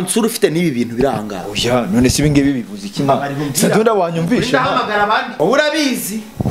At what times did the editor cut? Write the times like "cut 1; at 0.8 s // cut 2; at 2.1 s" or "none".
cut 1; at 5.3 s